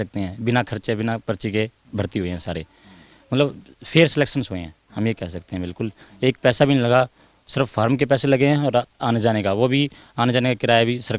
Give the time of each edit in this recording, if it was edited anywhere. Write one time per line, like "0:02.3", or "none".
none